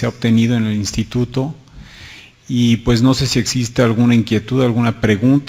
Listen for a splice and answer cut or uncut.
uncut